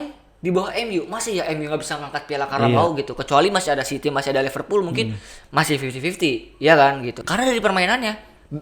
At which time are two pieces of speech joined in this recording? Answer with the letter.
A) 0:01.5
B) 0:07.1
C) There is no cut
B